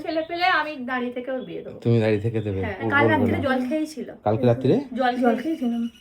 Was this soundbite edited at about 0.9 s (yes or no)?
no